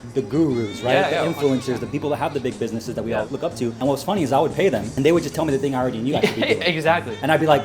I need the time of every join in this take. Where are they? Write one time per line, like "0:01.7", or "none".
0:01.8
0:03.5
0:04.9